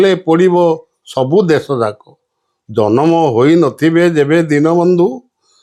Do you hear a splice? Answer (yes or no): no